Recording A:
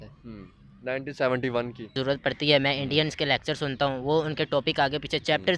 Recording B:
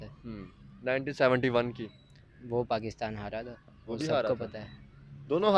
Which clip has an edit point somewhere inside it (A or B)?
A